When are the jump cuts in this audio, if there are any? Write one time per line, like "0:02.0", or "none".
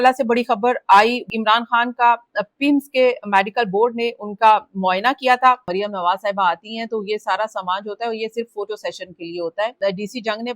0:01.3
0:05.7
0:09.7

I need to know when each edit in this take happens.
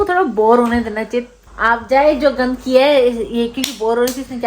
0:01.4

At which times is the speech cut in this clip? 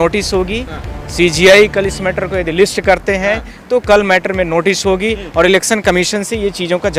none

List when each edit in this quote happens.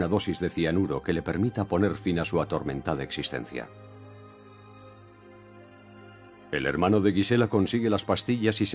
0:06.4

